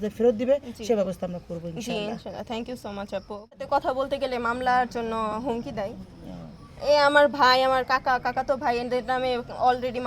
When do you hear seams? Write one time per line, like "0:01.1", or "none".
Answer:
0:03.6